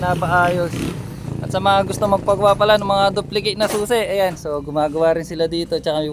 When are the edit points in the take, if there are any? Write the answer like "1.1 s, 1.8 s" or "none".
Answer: 1.3 s